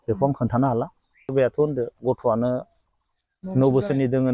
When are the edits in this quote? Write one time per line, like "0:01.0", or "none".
0:01.3